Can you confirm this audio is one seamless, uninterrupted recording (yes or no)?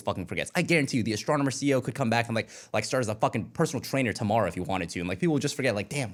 yes